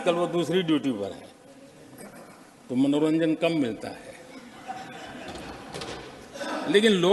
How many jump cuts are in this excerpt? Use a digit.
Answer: 0